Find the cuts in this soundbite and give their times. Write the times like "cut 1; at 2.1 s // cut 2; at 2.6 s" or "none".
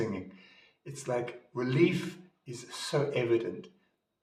none